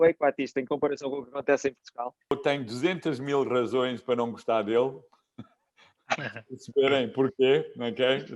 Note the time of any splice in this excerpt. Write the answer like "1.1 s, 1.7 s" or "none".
2.3 s